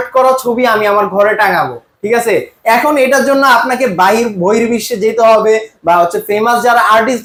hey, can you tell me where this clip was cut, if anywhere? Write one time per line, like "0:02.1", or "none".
none